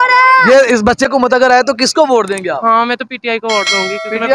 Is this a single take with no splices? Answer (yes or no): no